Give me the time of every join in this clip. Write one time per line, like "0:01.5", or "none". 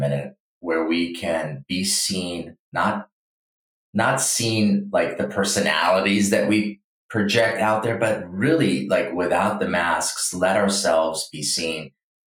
none